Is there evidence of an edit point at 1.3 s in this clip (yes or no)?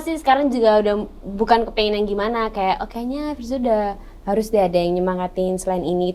no